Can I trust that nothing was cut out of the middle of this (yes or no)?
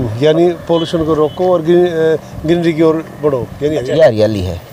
no